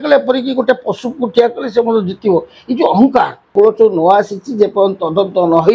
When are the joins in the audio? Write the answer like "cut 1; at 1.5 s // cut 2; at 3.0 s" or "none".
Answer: cut 1; at 3.5 s

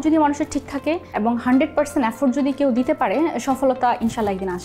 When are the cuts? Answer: cut 1; at 1.1 s

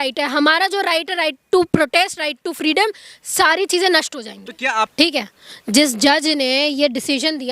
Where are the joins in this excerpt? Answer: cut 1; at 4.9 s

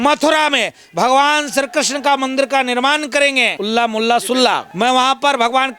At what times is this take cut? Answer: cut 1; at 3.5 s // cut 2; at 4.7 s

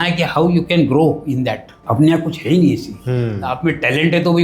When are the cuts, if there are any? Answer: cut 1; at 1.7 s

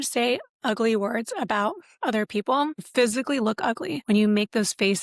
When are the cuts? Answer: cut 1; at 2.9 s // cut 2; at 4.0 s

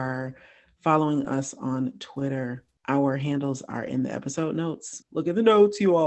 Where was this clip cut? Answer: cut 1; at 4.9 s

